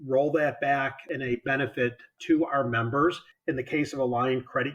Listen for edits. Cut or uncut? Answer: cut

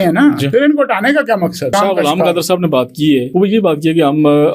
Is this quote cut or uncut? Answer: cut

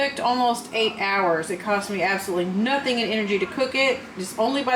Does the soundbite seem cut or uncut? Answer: uncut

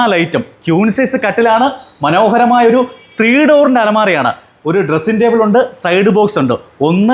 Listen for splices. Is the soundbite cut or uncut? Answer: uncut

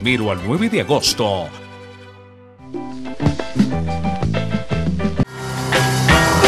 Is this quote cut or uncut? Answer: cut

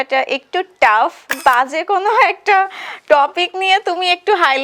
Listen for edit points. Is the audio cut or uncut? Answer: cut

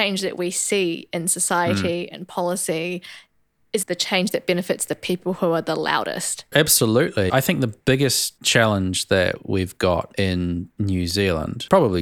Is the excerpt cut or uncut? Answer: uncut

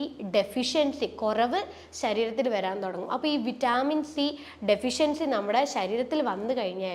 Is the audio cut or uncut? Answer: uncut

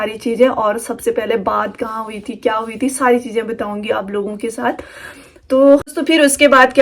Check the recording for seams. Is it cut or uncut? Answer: cut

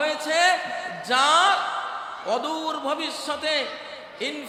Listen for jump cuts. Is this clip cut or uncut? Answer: uncut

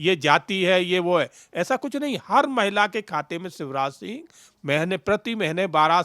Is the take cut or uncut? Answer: uncut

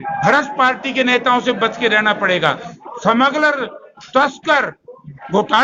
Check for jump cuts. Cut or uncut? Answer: uncut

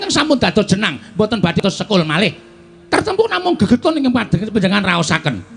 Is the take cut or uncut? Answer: cut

